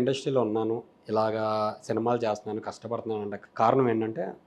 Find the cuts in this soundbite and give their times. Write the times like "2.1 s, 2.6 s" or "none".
3.4 s